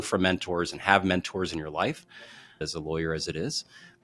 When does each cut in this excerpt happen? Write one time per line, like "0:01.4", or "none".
0:02.6